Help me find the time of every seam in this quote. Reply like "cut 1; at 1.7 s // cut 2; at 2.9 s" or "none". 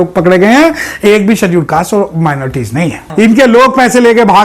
cut 1; at 3.0 s